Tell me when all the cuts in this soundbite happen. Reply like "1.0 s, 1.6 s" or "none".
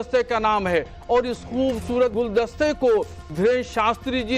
2.1 s, 3.2 s